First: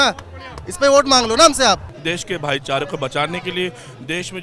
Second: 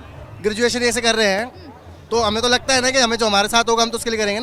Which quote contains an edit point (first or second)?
first